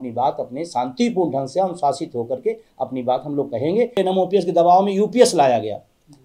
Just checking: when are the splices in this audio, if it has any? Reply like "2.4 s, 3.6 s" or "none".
4.0 s